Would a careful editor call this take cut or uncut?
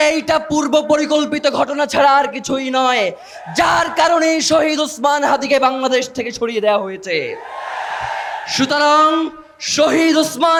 uncut